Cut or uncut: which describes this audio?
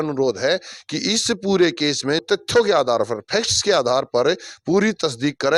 cut